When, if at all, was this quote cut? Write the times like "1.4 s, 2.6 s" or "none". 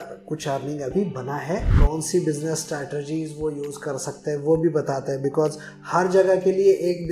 1.7 s